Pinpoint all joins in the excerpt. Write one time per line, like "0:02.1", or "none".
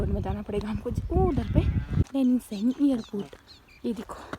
0:02.0